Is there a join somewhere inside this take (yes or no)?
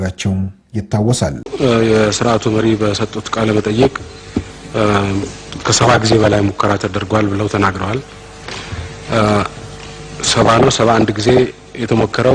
yes